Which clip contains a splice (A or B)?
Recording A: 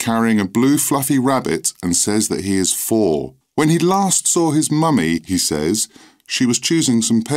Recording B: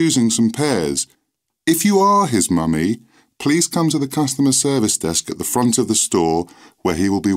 A